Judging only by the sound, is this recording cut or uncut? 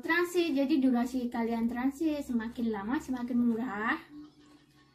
uncut